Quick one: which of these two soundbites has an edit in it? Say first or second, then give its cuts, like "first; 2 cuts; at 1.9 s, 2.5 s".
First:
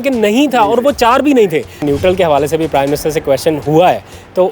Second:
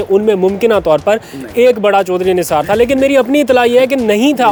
first; 1 cut; at 1.8 s